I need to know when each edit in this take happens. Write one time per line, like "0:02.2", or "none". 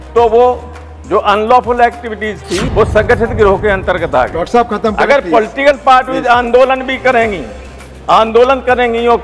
0:02.6